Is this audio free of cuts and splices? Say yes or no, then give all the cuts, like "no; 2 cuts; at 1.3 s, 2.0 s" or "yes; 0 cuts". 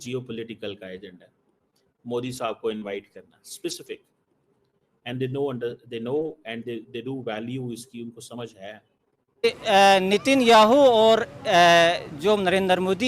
no; 1 cut; at 9.4 s